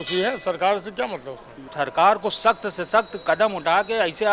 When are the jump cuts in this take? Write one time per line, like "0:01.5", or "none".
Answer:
0:01.6